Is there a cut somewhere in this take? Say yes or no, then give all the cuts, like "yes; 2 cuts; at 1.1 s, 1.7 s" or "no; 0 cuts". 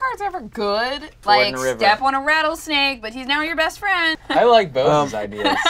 yes; 2 cuts; at 1.1 s, 4.0 s